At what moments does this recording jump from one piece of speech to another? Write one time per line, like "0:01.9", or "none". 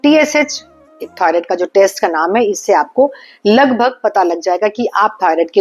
none